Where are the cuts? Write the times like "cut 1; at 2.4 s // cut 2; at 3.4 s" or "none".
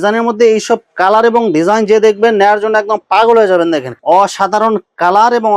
cut 1; at 3.9 s